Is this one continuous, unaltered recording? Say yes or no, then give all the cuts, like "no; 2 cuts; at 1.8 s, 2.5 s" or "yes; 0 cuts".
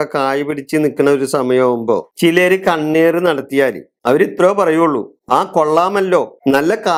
yes; 0 cuts